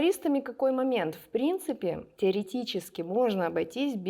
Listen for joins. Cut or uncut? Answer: uncut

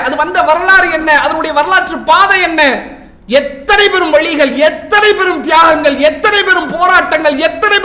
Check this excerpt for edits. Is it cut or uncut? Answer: uncut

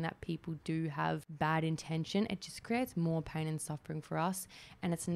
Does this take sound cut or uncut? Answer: cut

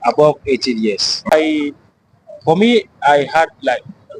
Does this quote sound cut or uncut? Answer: cut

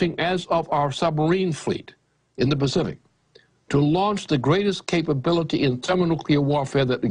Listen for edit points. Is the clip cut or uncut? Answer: cut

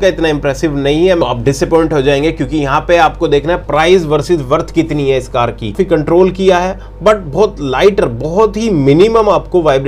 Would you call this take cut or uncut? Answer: cut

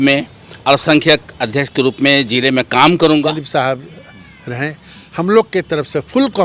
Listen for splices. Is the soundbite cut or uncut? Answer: cut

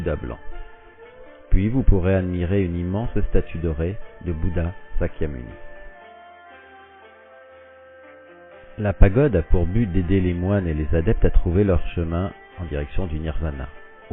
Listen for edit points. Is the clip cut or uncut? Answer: cut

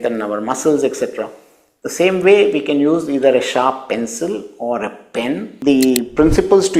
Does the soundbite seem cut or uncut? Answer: cut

